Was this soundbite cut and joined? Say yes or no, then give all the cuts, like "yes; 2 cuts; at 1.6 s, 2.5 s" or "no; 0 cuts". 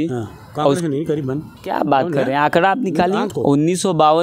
yes; 2 cuts; at 1.5 s, 3.3 s